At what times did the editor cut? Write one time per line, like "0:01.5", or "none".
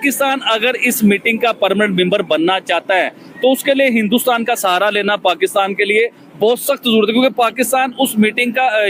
none